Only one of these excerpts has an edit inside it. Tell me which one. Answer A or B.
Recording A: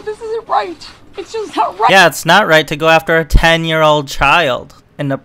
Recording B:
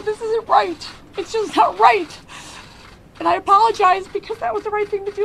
B